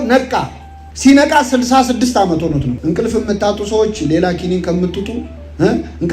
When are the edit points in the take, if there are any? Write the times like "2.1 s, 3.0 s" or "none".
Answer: 2.8 s